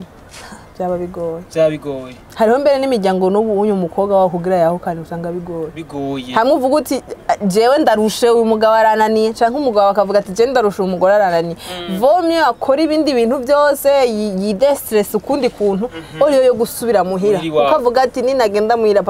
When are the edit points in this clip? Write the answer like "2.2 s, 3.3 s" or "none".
none